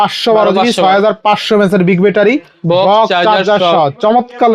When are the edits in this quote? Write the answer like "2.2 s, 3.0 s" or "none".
none